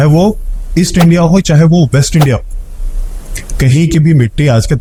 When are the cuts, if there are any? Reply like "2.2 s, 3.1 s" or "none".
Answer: none